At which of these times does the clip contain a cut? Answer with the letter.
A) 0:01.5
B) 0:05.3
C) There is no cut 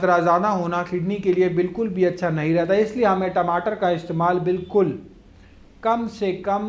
C